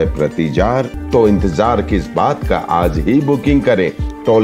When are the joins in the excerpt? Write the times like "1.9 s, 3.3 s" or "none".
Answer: 1.0 s